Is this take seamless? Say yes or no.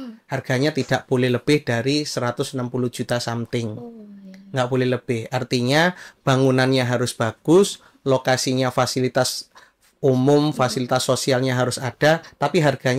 yes